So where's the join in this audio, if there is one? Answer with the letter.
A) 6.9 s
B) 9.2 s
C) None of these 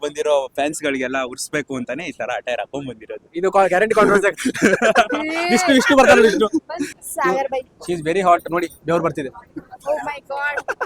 A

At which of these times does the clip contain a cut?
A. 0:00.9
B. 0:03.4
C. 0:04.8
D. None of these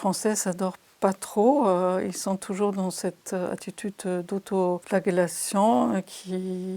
C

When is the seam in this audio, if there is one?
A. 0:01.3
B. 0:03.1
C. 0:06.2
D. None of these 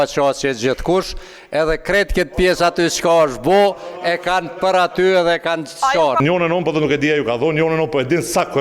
C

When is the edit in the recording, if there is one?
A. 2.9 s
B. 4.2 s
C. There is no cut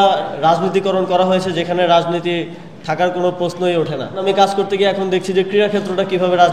B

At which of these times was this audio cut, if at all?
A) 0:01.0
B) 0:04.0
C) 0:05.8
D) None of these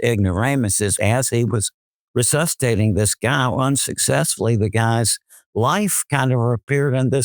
A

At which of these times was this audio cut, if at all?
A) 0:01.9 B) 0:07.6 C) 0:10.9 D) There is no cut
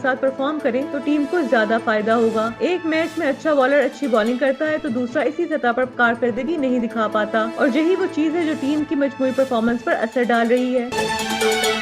C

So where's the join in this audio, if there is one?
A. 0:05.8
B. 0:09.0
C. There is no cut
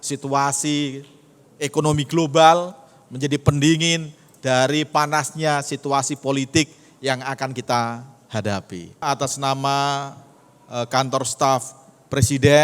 B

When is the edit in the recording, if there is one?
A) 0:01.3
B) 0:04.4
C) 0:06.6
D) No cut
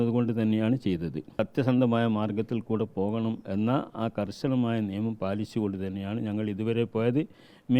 A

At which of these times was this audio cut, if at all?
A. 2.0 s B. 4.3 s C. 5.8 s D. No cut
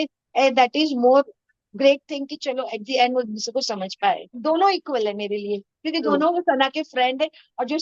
B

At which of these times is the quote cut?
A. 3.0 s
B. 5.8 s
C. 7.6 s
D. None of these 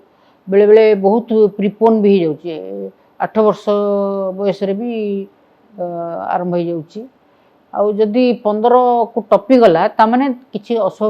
D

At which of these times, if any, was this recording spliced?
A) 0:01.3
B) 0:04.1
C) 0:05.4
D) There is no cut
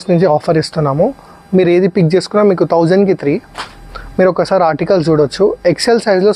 D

